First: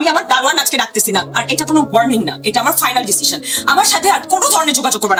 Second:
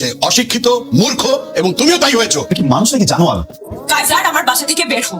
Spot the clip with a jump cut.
second; 1 cut; at 3.8 s

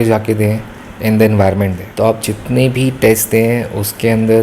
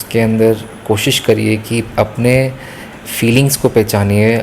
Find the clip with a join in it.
first; 1 cut; at 1.8 s

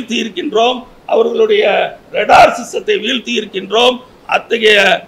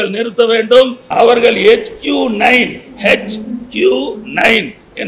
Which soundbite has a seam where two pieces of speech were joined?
second; 1 cut; at 1.0 s

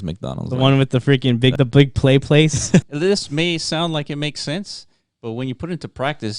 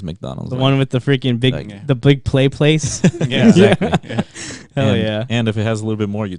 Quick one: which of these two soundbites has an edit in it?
first; 2 cuts; at 1.5 s, 2.9 s

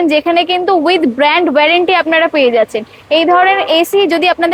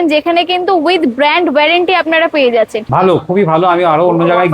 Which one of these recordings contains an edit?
second; 1 cut; at 2.8 s

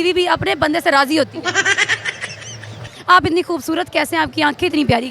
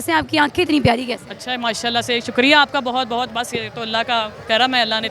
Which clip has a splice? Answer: first; 1 cut; at 2.9 s

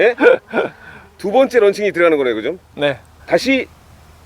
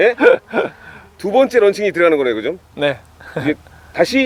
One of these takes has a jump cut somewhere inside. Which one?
first; 1 cut; at 3.1 s

